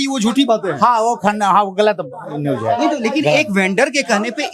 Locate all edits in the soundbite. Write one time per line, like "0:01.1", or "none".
none